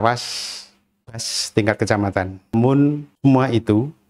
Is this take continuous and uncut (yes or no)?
no